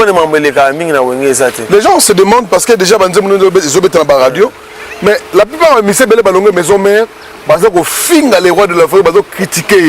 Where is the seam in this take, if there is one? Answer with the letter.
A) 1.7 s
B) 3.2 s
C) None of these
C